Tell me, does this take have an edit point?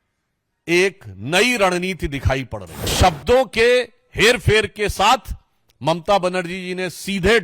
yes; 1 cut; at 2.9 s

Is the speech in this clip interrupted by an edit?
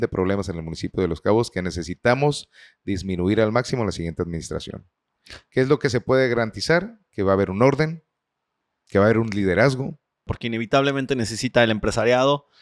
yes; 1 cut; at 10.4 s

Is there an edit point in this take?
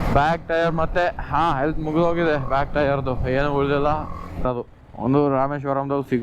yes; 1 cut; at 4.5 s

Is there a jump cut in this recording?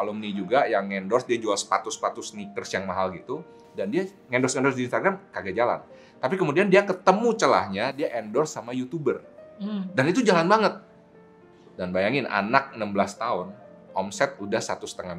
no; 0 cuts

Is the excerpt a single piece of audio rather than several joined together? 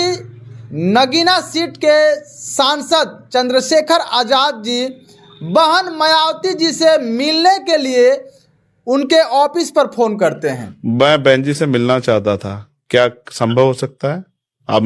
no; 1 cut; at 10.7 s

